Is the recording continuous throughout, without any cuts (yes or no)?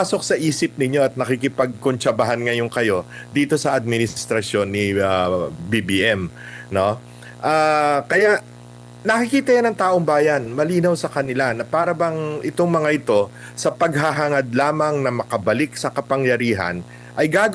yes